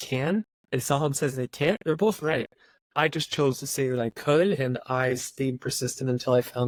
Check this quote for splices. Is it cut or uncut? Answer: uncut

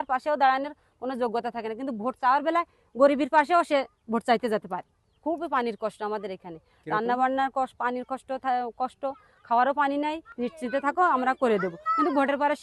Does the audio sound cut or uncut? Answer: cut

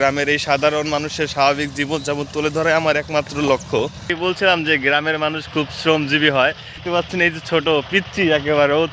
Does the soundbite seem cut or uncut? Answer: cut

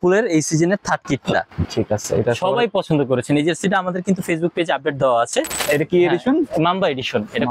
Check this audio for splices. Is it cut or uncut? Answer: cut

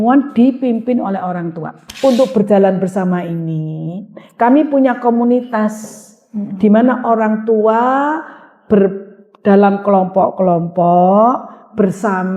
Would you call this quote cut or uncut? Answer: cut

